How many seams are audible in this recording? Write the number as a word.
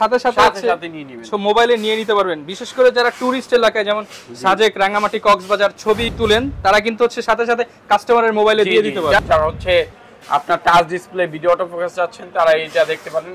two